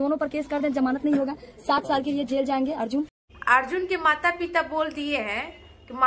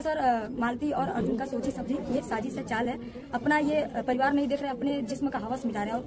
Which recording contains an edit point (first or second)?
first